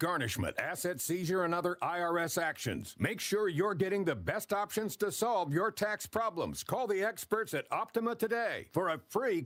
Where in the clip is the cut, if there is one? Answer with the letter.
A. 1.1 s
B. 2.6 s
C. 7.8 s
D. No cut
D